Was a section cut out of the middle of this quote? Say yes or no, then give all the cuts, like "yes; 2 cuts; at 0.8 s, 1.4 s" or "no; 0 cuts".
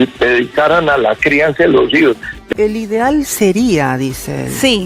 yes; 1 cut; at 2.3 s